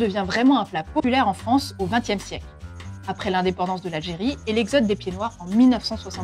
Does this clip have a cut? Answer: yes; 1 cut; at 1.0 s

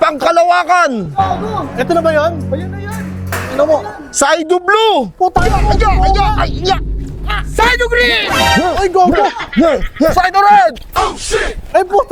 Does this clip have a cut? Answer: no; 0 cuts

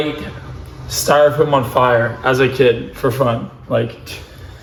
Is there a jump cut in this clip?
no; 0 cuts

